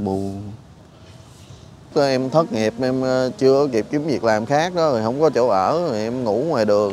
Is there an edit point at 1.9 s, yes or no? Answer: yes